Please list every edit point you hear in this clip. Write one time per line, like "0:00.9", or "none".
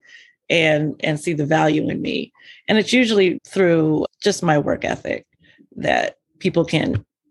0:03.4